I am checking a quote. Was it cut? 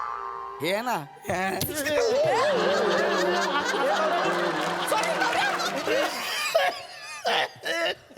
yes; 1 cut; at 5.8 s

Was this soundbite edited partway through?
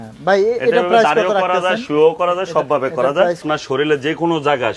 yes; 1 cut; at 3.4 s

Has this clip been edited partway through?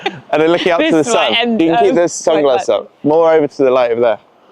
no; 0 cuts

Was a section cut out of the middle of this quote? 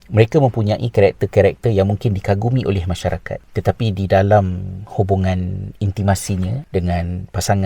yes; 1 cut; at 3.4 s

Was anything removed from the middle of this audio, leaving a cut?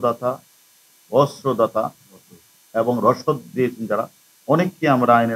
no; 0 cuts

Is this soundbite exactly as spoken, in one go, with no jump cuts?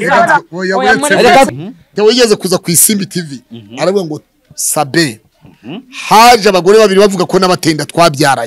no; 1 cut; at 1.7 s

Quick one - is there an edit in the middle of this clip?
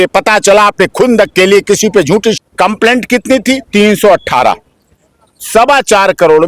yes; 1 cut; at 2.4 s

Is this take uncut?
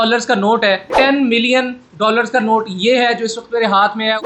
no; 1 cut; at 0.9 s

